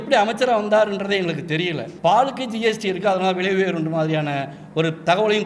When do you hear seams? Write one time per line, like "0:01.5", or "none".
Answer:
0:01.9